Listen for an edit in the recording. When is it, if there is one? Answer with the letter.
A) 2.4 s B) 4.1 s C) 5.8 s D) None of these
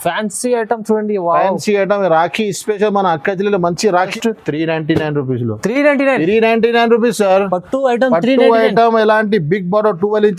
B